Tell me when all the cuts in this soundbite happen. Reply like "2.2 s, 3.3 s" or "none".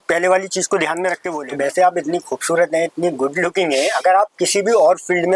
1.3 s